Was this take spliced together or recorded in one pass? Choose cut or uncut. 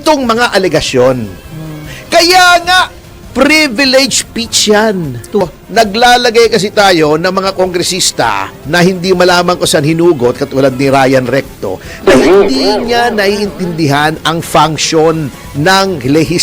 cut